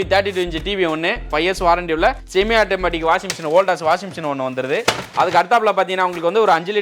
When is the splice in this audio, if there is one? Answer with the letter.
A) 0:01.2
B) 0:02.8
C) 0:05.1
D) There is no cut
A